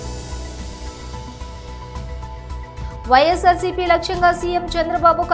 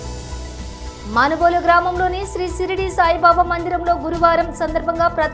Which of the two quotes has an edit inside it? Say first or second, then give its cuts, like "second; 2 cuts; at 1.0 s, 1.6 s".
first; 1 cut; at 0.9 s